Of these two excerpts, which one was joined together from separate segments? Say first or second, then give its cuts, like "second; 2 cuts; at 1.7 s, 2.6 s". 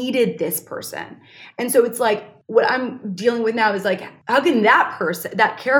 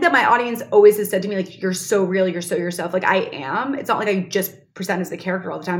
first; 2 cuts; at 2.3 s, 4.1 s